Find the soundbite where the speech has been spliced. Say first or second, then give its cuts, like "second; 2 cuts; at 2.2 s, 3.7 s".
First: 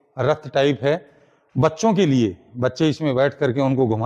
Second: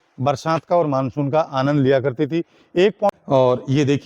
second; 1 cut; at 3.1 s